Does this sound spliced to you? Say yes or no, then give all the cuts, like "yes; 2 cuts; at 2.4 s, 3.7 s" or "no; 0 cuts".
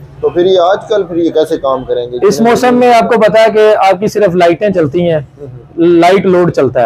no; 0 cuts